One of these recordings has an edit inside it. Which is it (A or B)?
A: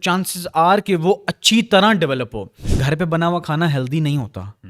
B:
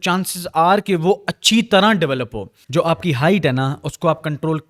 A